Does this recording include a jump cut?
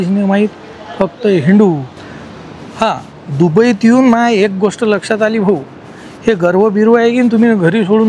yes; 1 cut; at 1.9 s

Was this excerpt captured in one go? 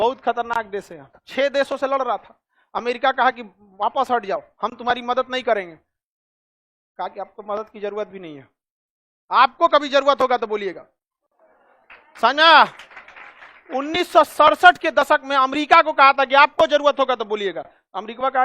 no; 1 cut; at 1.2 s

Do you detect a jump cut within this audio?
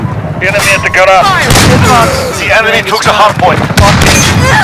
yes; 1 cut; at 1.2 s

